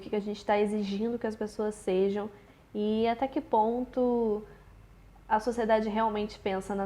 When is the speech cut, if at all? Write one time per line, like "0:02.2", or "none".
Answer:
none